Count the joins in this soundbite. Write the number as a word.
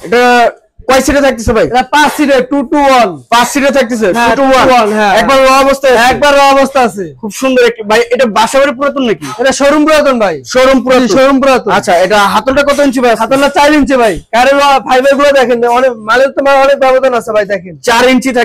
zero